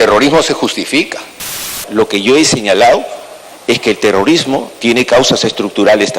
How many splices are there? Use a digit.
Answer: 1